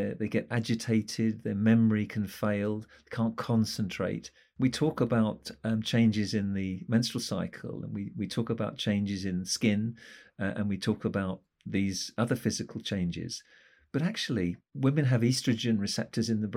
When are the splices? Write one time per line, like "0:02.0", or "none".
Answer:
none